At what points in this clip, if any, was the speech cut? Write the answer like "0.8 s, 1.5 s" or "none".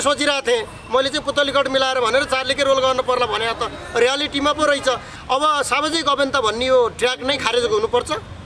5.1 s